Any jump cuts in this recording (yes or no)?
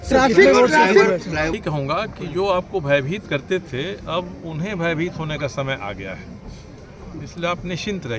yes